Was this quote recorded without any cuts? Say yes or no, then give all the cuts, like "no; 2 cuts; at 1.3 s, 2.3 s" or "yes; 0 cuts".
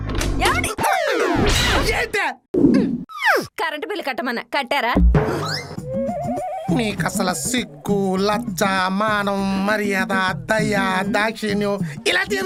yes; 0 cuts